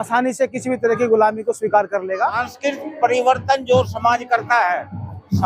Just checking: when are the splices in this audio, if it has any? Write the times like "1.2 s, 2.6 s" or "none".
2.5 s